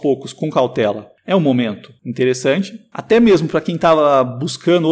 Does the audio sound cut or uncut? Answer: uncut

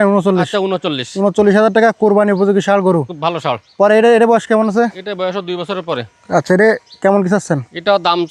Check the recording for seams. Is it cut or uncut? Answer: uncut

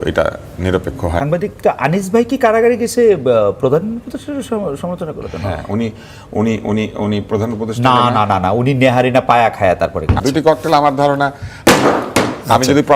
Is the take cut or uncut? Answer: cut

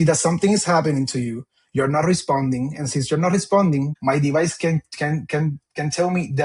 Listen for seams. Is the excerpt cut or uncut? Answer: cut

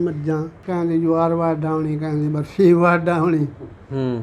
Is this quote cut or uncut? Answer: uncut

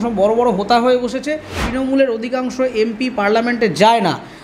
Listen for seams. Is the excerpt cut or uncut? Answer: cut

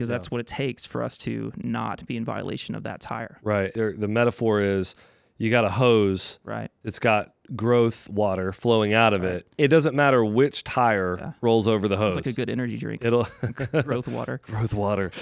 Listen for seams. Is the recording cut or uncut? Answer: cut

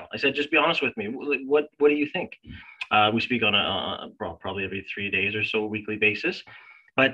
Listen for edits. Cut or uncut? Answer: uncut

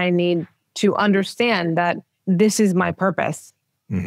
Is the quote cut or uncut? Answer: cut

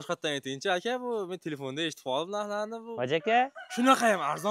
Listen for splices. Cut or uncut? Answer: uncut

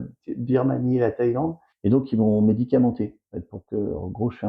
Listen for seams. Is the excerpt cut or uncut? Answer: cut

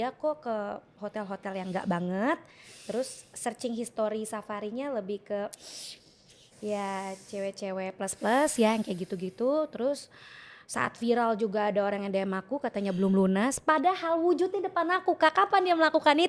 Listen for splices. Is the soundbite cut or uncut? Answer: uncut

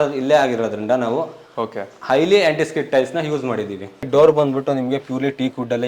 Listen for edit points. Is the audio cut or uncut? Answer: cut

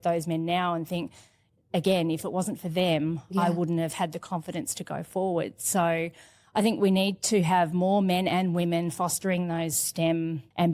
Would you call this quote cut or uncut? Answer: uncut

